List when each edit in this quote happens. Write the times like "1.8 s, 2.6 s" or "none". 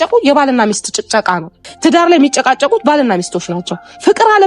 1.6 s